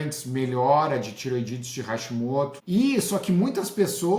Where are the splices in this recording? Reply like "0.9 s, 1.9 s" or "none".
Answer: 2.6 s